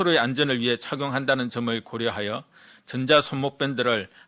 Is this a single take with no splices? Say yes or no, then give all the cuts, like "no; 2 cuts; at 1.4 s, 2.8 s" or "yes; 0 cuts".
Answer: yes; 0 cuts